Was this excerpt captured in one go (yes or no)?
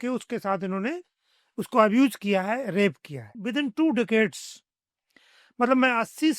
no